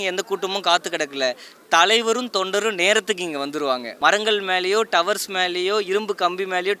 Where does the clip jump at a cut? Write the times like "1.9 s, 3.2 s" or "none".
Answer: 3.9 s